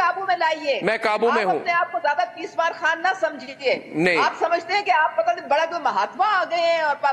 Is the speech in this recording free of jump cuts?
yes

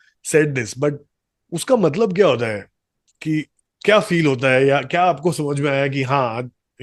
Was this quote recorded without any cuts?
yes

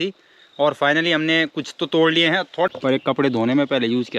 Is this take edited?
yes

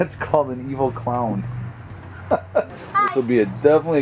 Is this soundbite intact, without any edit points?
no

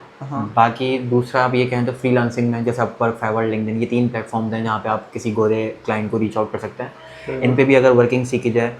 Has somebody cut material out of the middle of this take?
no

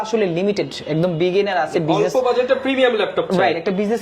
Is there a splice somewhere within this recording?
no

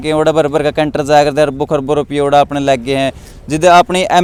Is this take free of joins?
yes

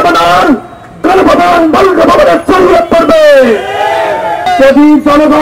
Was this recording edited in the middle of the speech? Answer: yes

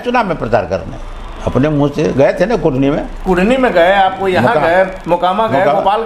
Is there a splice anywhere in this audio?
no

